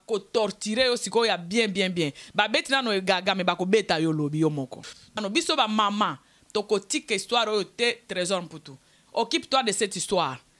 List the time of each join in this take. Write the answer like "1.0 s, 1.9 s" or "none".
5.2 s